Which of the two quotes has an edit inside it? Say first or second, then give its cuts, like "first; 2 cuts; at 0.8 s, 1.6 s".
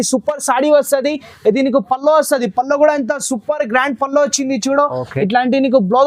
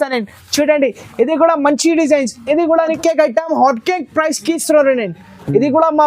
second; 1 cut; at 3.0 s